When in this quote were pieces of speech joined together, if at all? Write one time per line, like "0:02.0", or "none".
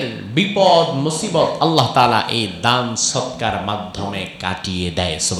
none